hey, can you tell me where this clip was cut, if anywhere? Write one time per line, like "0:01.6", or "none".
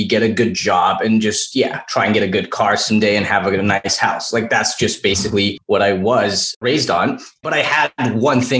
0:03.9
0:05.6
0:06.6